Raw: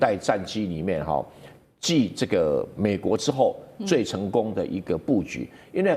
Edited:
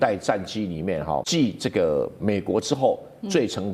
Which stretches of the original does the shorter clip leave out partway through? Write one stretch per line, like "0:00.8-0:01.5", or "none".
0:01.3-0:01.8